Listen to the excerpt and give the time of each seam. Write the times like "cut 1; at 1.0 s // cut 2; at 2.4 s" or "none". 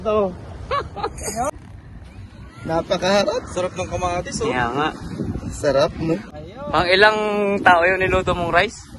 cut 1; at 1.5 s // cut 2; at 6.2 s